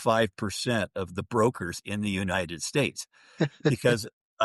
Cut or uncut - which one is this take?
uncut